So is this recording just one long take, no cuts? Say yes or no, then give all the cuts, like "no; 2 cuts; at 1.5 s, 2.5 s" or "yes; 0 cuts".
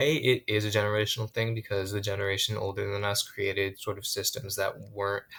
yes; 0 cuts